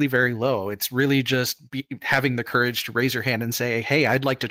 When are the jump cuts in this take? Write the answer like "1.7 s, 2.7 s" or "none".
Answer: none